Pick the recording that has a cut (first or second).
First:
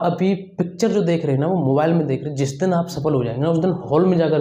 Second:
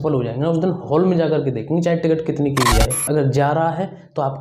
second